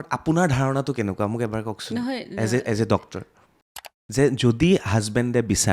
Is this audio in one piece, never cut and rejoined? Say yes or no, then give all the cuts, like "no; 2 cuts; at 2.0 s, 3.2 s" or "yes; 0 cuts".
no; 1 cut; at 3.8 s